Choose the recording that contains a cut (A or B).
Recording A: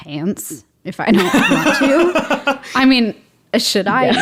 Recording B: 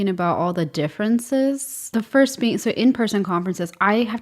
B